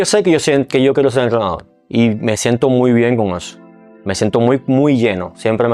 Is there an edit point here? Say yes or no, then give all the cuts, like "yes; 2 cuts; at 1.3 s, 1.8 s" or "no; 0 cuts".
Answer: no; 0 cuts